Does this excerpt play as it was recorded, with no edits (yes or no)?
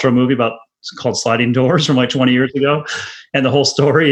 yes